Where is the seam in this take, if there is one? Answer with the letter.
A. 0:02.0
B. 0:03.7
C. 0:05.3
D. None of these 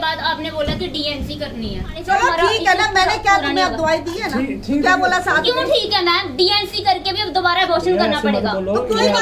A